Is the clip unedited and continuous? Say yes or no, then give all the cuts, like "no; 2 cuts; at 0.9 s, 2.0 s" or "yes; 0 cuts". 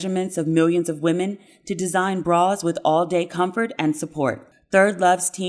no; 1 cut; at 4.5 s